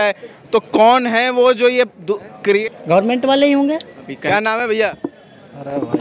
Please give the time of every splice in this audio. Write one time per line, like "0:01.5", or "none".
0:02.6
0:04.2